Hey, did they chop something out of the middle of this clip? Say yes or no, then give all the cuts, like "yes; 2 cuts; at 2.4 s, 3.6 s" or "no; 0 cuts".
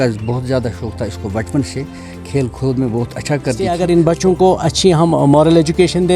yes; 1 cut; at 3.7 s